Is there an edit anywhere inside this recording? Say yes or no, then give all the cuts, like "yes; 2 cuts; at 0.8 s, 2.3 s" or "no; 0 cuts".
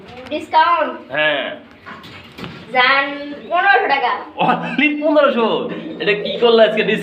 no; 0 cuts